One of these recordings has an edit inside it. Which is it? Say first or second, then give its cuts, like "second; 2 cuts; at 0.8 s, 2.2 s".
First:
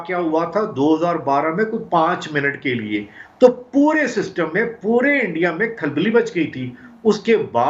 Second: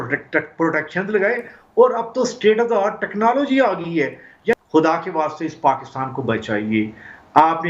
second; 1 cut; at 4.5 s